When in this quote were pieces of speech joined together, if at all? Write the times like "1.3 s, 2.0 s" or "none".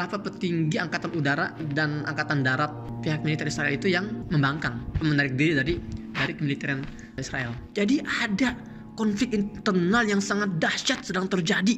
1.6 s, 2.9 s, 4.2 s